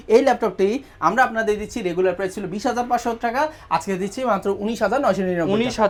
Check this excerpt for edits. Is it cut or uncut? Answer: uncut